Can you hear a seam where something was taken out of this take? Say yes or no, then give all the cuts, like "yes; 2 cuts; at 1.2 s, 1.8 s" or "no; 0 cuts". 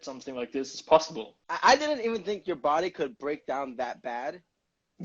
yes; 1 cut; at 1.6 s